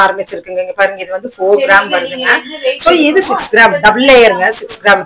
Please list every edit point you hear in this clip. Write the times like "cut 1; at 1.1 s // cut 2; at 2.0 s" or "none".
none